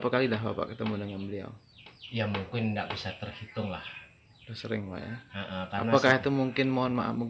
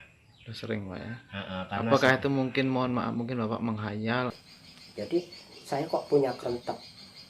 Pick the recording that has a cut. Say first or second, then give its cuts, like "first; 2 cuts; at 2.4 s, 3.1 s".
second; 1 cut; at 4.8 s